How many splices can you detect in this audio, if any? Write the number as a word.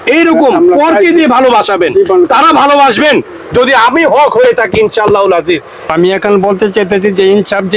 one